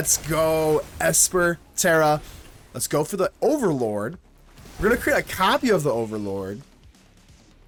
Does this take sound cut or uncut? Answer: uncut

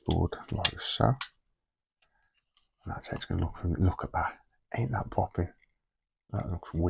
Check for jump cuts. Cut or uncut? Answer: uncut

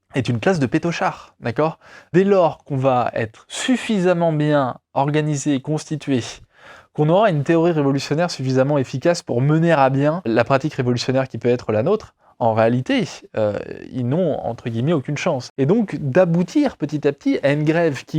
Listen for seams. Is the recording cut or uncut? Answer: cut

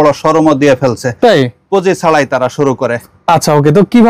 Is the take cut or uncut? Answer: uncut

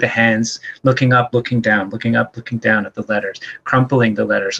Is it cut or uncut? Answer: uncut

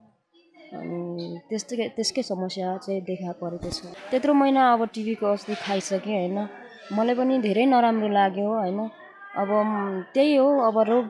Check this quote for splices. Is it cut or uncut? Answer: cut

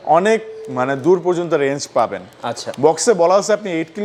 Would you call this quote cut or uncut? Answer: uncut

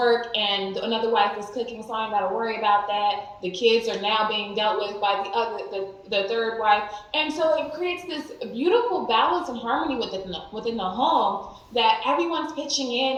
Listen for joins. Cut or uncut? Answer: uncut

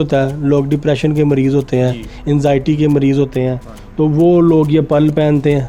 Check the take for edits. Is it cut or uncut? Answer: uncut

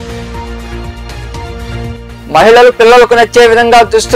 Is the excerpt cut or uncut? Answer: uncut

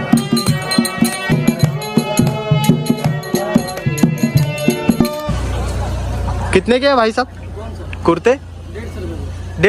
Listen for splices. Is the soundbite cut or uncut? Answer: cut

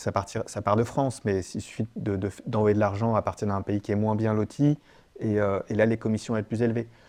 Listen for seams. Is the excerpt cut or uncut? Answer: uncut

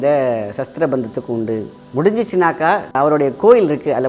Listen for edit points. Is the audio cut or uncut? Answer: uncut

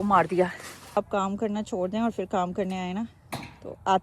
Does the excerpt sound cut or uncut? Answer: cut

